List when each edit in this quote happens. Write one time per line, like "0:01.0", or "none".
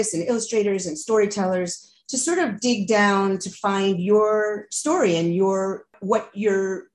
0:06.0